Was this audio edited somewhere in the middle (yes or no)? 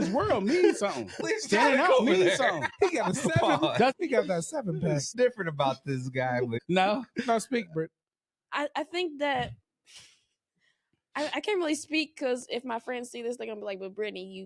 yes